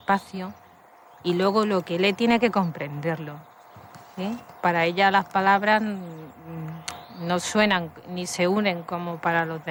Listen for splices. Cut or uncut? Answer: uncut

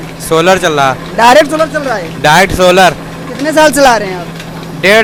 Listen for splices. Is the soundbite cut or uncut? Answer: uncut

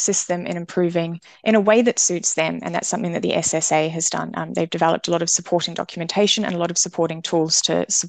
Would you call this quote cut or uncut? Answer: uncut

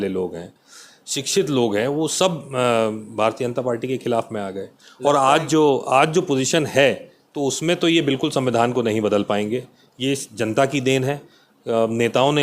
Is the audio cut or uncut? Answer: uncut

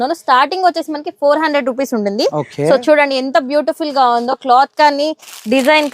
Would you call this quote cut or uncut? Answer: uncut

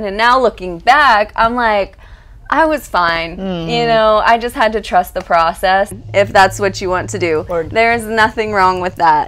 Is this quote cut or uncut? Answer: cut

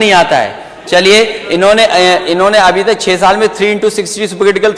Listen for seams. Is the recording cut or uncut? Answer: uncut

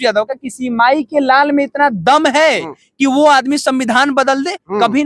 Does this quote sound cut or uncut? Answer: uncut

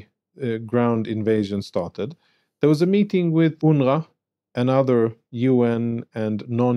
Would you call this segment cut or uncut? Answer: cut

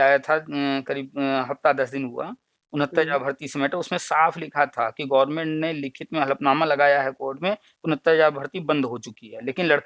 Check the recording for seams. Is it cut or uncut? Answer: uncut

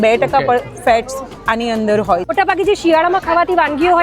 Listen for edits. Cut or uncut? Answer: cut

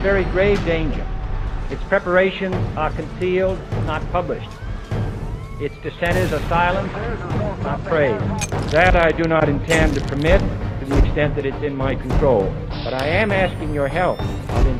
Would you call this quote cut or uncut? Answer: uncut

